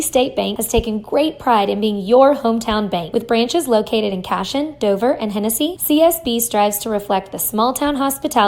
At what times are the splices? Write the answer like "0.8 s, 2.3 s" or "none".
2.0 s